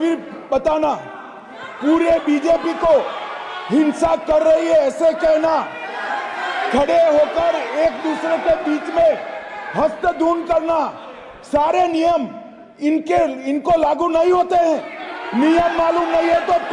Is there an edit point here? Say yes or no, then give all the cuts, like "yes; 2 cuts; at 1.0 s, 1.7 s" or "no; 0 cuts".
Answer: no; 0 cuts